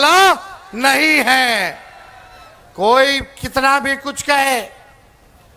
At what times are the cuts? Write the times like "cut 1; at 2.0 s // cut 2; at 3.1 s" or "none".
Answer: none